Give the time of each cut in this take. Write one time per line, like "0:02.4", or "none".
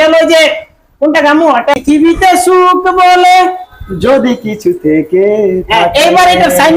0:01.7